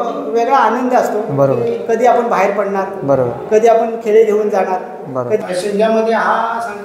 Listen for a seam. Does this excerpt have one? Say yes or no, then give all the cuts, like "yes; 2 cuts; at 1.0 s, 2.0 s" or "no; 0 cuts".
yes; 1 cut; at 5.4 s